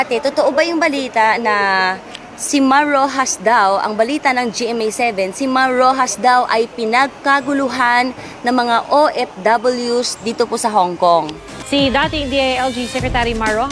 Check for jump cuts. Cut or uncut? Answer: uncut